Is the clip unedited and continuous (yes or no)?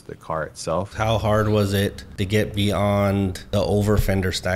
no